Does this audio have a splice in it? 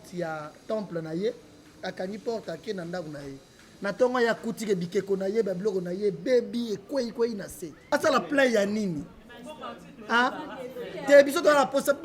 yes; 1 cut; at 7.7 s

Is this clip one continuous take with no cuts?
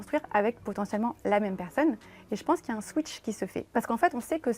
no; 1 cut; at 3.7 s

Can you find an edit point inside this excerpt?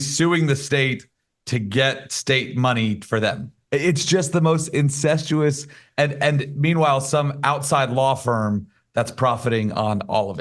no; 0 cuts

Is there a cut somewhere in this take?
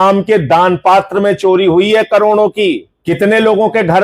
yes; 1 cut; at 2.9 s

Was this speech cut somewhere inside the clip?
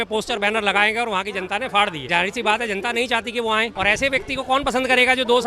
yes; 2 cuts; at 2.0 s, 3.7 s

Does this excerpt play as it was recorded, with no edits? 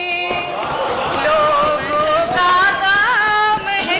yes; 0 cuts

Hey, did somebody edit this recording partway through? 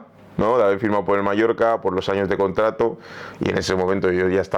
no; 0 cuts

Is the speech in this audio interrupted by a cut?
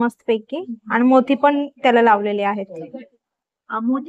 no; 0 cuts

